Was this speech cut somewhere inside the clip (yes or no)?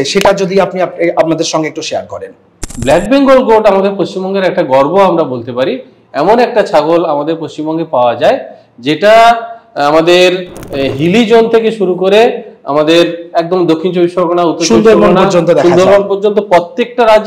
yes